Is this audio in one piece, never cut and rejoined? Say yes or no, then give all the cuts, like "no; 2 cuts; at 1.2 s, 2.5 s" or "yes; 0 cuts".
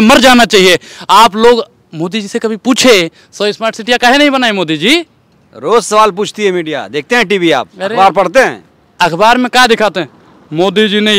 yes; 0 cuts